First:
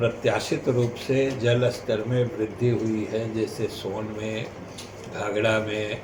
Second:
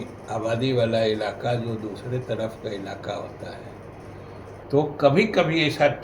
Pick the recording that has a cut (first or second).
second